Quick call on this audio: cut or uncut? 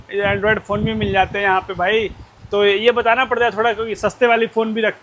uncut